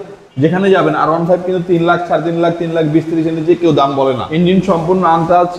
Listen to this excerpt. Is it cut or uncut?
cut